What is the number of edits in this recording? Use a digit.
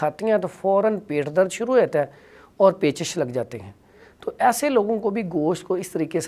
0